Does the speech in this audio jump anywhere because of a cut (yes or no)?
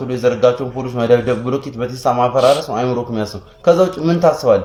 no